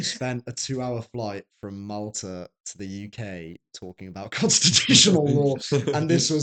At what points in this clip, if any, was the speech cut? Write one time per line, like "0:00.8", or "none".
none